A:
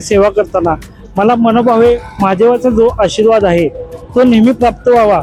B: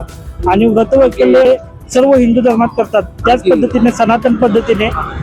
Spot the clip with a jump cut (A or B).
B